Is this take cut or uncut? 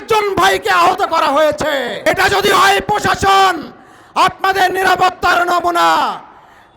cut